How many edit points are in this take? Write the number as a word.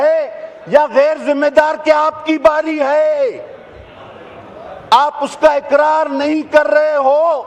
zero